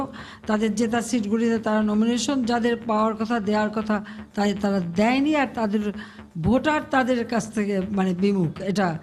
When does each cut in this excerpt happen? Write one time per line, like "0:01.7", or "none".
none

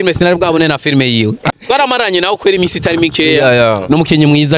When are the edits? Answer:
0:01.4

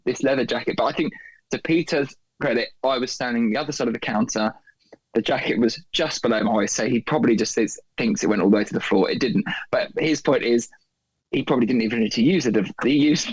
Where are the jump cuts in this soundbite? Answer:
none

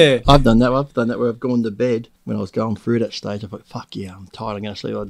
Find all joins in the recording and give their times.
0:02.2

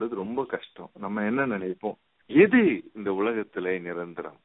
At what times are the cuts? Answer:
0:02.1

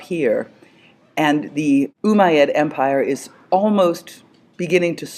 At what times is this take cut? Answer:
0:02.5

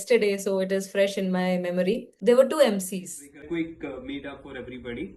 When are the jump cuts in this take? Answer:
0:02.1
0:03.5

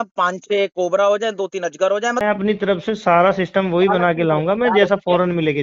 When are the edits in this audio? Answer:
0:02.2

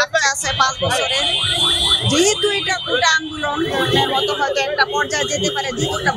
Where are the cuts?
none

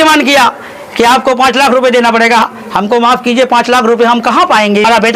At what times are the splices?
none

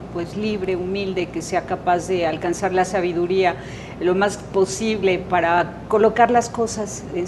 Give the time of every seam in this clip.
0:01.9

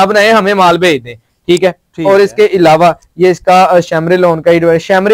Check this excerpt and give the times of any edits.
none

